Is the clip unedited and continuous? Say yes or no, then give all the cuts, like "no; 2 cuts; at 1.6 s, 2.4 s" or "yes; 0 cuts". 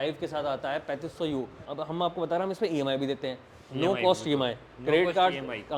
no; 1 cut; at 1.7 s